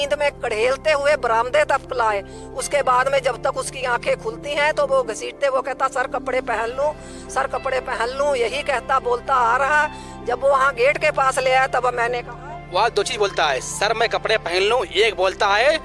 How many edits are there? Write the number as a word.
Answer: zero